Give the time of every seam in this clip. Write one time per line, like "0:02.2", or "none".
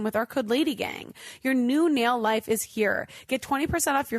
none